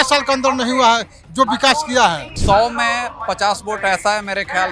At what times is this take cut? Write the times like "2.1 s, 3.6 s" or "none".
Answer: 2.3 s